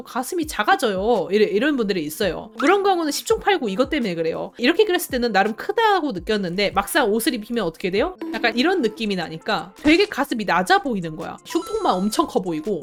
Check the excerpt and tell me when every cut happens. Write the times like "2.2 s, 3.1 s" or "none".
none